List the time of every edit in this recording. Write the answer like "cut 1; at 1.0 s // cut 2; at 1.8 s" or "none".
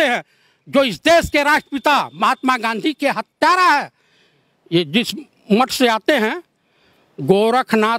none